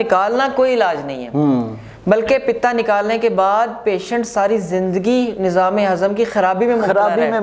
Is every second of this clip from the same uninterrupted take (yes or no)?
yes